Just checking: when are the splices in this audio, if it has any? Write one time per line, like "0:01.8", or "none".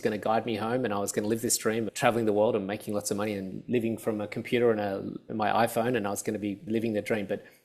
0:01.9
0:05.2
0:06.6